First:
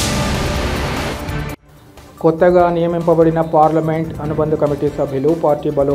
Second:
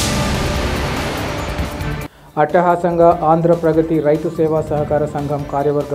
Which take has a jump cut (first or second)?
first